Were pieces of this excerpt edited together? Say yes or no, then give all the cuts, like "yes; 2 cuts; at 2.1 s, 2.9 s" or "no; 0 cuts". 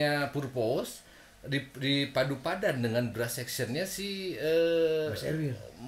no; 0 cuts